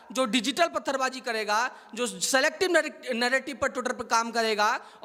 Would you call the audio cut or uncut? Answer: uncut